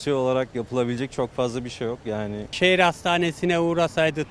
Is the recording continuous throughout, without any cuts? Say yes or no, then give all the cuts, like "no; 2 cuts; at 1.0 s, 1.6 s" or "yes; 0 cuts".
no; 1 cut; at 2.5 s